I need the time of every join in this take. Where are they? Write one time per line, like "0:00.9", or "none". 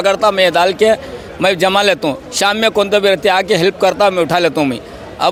none